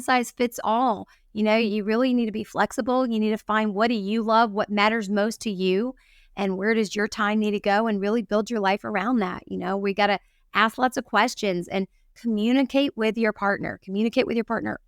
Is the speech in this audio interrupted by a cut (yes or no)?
no